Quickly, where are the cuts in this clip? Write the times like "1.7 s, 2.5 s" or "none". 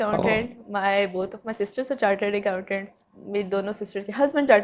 none